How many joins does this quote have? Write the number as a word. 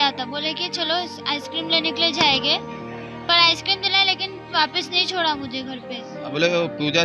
one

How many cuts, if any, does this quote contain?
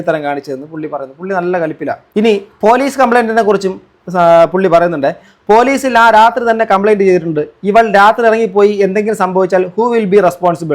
one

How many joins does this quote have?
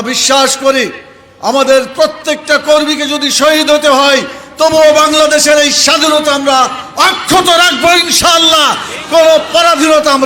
zero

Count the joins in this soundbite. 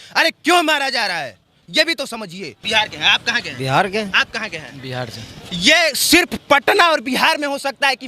one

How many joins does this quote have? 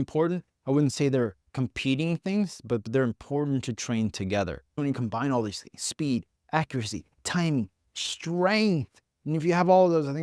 one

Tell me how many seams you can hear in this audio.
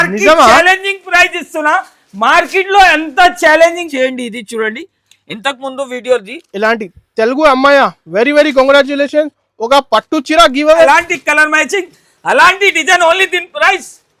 two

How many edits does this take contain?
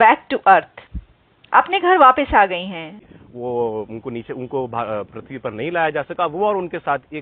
one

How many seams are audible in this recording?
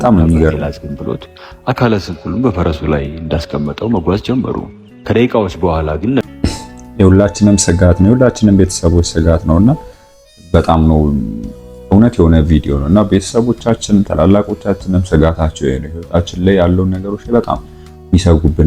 one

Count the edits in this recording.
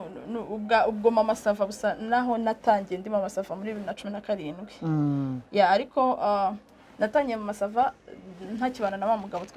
zero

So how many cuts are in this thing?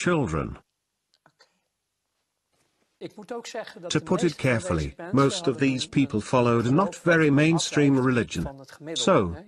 one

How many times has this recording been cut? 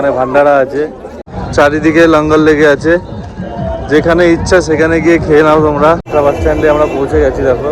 two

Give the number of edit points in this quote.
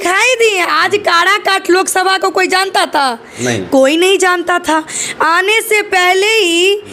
zero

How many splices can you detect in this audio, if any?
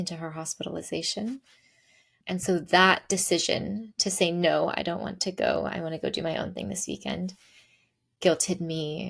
zero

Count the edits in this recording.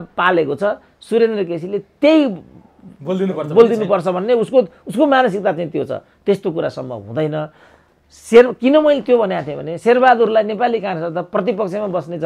zero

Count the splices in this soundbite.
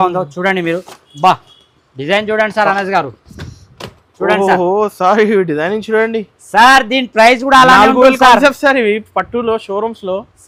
zero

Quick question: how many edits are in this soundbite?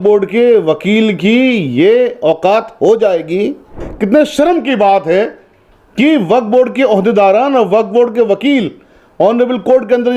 one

